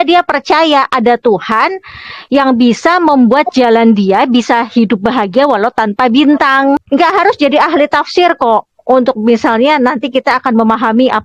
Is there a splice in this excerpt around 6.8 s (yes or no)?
yes